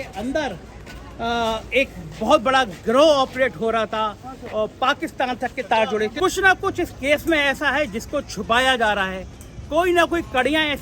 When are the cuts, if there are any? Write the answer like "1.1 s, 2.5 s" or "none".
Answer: 6.1 s